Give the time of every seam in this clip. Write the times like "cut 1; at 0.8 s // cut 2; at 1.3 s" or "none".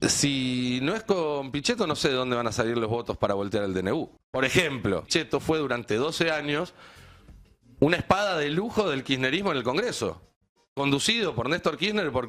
cut 1; at 4.2 s // cut 2; at 5.1 s